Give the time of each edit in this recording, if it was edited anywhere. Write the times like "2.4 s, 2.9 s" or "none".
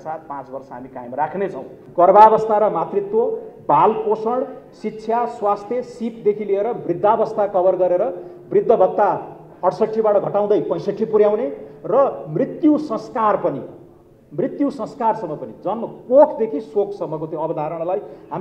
1.7 s